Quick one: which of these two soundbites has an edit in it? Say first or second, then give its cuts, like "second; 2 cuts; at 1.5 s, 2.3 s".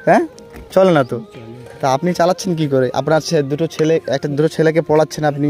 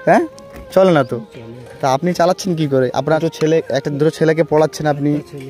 second; 1 cut; at 3.2 s